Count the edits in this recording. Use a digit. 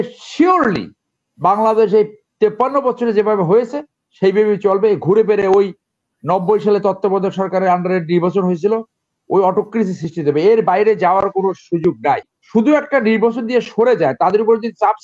1